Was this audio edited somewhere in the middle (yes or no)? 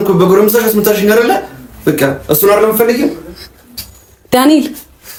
no